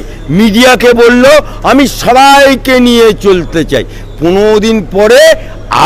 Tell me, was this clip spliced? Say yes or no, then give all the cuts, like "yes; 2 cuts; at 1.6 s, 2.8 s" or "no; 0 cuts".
no; 0 cuts